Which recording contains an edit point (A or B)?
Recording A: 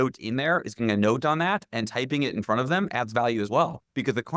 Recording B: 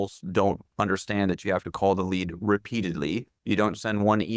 B